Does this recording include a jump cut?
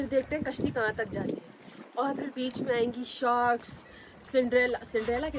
no; 0 cuts

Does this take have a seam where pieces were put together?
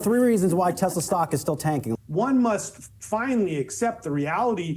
yes; 1 cut; at 1.9 s

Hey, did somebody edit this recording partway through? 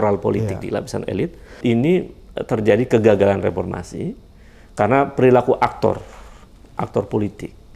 yes; 1 cut; at 1.6 s

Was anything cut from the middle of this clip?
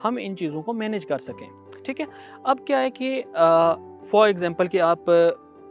no; 0 cuts

